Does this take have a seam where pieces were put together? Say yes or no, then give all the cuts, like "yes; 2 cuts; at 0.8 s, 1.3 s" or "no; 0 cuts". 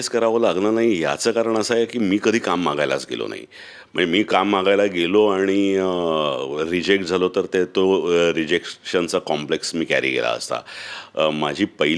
no; 0 cuts